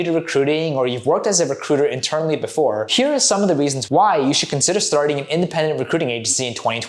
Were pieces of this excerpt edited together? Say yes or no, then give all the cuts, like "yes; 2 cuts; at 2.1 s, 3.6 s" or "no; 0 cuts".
no; 0 cuts